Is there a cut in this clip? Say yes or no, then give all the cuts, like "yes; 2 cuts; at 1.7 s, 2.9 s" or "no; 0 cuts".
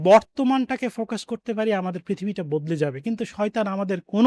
no; 0 cuts